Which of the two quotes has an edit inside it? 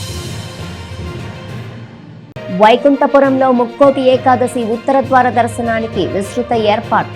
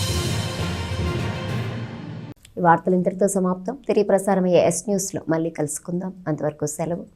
first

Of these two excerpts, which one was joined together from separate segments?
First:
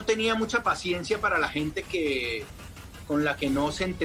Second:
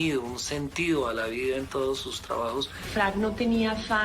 second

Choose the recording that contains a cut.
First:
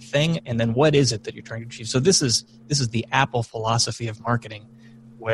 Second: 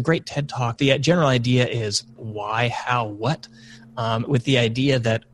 second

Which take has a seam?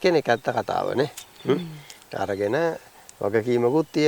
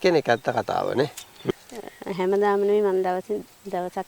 second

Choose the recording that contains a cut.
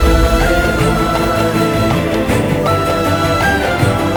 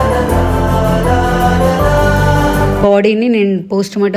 second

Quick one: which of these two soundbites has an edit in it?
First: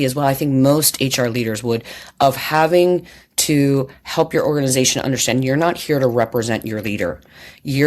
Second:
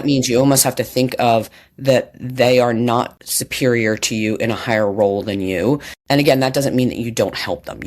second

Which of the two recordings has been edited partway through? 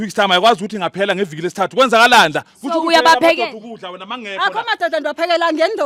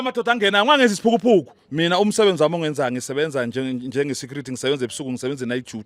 second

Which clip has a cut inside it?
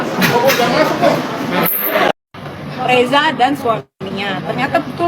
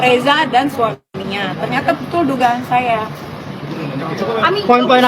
first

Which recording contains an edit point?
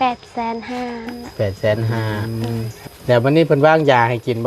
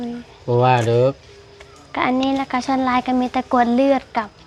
first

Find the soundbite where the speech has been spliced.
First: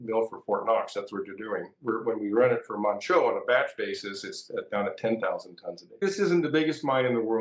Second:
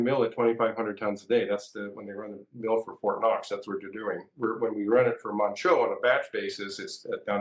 first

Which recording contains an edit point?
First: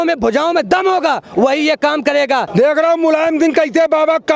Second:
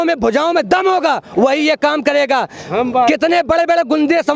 first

